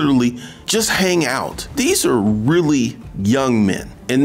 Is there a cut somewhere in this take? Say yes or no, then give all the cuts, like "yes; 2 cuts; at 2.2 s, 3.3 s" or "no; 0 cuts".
yes; 1 cut; at 1.6 s